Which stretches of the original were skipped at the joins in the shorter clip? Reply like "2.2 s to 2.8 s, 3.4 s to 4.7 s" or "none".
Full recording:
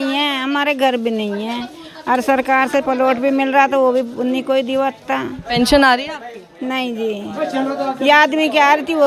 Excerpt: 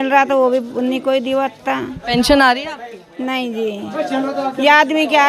none